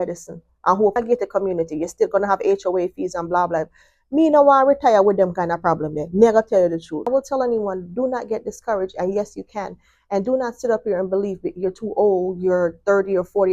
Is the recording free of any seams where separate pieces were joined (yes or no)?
no